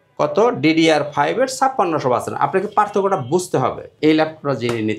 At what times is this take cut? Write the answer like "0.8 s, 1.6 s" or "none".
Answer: 3.9 s